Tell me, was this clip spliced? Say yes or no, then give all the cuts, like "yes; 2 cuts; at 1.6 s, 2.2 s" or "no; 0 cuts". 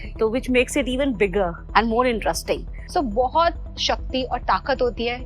yes; 1 cut; at 2.8 s